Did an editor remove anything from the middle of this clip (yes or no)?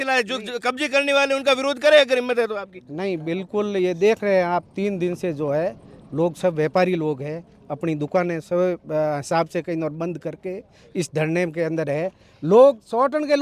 no